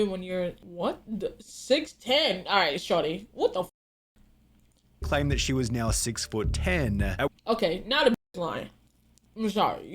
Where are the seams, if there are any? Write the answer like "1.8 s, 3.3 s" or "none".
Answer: 8.3 s